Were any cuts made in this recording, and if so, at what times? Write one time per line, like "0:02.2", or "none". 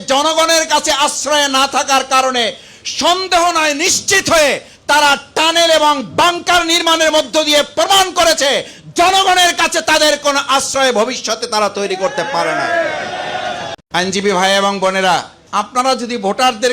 0:13.7
0:15.4